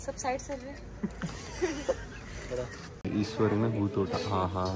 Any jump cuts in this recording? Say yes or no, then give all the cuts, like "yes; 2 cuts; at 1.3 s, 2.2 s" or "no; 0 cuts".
yes; 1 cut; at 3.0 s